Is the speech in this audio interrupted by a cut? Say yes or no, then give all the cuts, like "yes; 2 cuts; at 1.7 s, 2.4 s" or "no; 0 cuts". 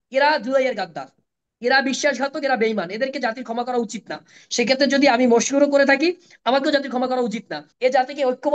yes; 1 cut; at 7.6 s